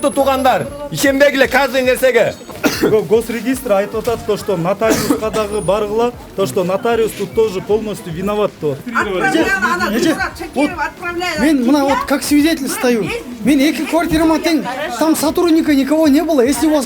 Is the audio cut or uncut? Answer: cut